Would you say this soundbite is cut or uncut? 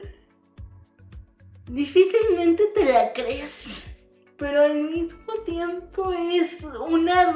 cut